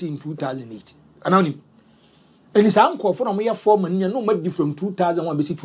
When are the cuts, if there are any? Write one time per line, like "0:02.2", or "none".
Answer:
none

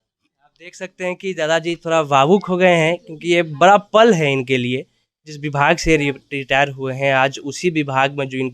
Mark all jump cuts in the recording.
0:05.4

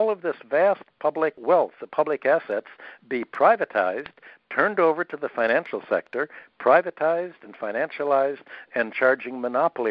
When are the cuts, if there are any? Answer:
none

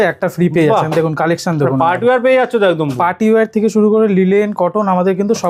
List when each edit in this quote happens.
none

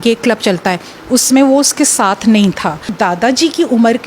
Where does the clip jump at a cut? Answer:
0:02.9

